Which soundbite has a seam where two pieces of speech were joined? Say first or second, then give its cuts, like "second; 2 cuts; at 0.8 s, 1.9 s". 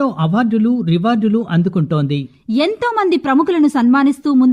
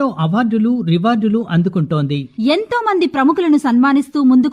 second; 1 cut; at 2.3 s